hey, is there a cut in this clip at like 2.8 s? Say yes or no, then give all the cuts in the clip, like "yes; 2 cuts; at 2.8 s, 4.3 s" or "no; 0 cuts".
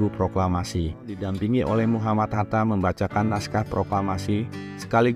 no; 1 cut; at 1.2 s